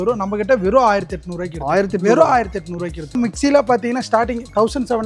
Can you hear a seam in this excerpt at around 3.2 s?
yes; 1 cut; at 3.2 s

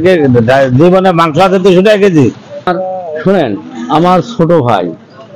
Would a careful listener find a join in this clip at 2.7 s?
yes; 1 cut; at 2.7 s

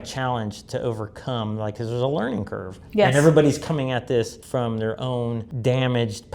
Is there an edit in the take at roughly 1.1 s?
no; 2 cuts; at 4.4 s, 5.5 s

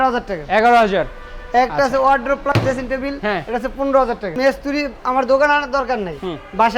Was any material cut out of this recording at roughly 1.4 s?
no; 1 cut; at 4.4 s

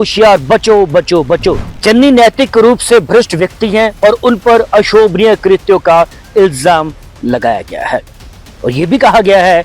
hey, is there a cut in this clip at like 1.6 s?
yes; 1 cut; at 1.6 s

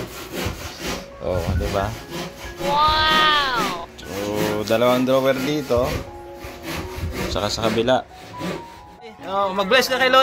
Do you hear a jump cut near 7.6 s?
no; 1 cut; at 9.2 s

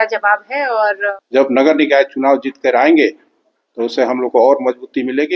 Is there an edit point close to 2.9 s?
no; 1 cut; at 1.1 s

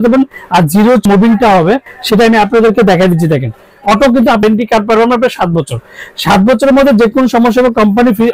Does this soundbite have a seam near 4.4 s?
yes; 2 cuts; at 1.1 s, 4.4 s

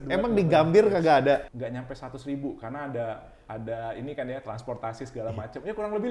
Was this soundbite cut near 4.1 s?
no; 1 cut; at 1.6 s

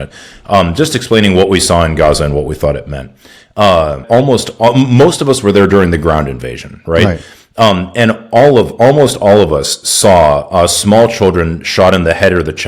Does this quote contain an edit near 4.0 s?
yes; 1 cut; at 4.0 s

